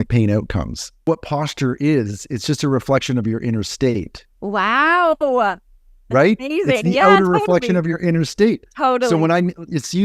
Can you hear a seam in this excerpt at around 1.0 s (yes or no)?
yes